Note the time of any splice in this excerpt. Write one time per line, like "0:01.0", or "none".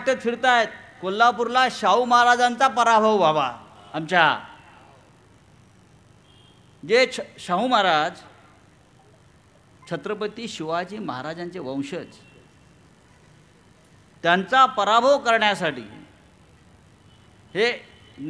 none